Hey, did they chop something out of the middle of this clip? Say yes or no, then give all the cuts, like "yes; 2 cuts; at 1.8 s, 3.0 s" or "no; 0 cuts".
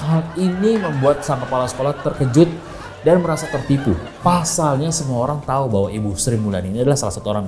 no; 0 cuts